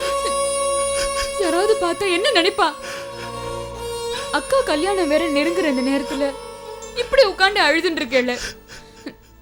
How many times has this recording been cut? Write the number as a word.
zero